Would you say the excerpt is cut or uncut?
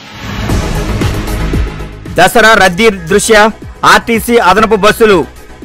cut